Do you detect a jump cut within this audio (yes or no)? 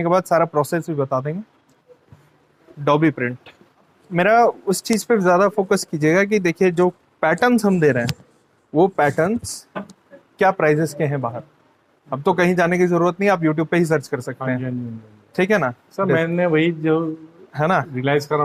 no